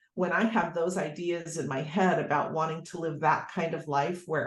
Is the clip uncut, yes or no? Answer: yes